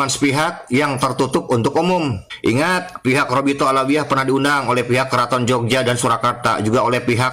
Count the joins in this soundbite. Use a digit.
1